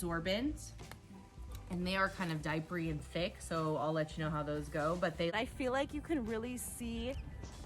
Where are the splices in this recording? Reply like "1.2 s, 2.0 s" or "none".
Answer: 5.3 s